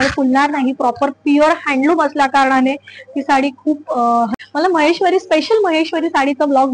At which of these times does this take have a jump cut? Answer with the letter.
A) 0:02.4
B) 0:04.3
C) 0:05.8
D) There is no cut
B